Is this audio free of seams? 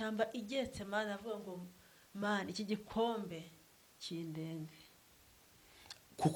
yes; 0 cuts

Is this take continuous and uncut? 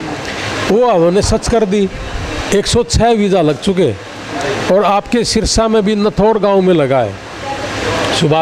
yes; 0 cuts

